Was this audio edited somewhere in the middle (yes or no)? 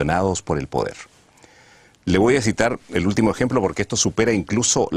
yes